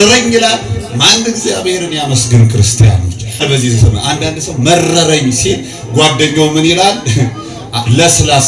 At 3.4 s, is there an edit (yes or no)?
yes